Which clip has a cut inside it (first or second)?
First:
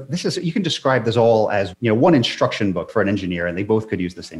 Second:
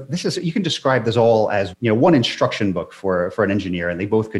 first